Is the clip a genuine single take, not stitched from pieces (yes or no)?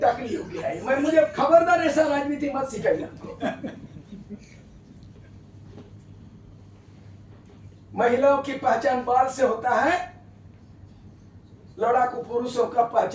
yes